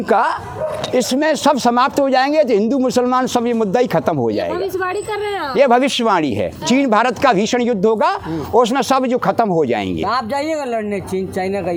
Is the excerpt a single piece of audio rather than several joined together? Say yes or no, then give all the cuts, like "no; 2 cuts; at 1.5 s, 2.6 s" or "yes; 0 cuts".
yes; 0 cuts